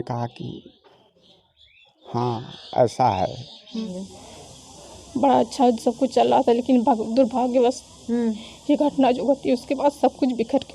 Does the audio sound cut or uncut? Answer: cut